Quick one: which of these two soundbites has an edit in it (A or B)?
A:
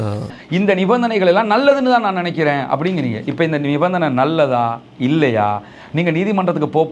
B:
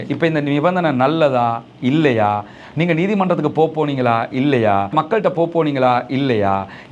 B